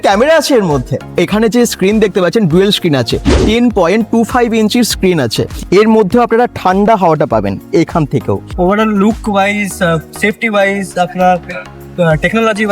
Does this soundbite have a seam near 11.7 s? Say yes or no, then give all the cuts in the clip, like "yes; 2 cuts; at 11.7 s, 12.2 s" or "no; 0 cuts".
no; 3 cuts; at 1.1 s, 5.6 s, 8.5 s